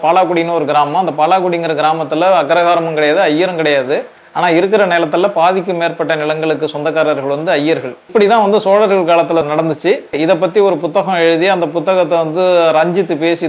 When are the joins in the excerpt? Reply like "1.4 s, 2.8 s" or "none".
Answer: 8.1 s, 9.8 s